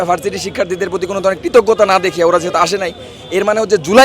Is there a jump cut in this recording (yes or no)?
no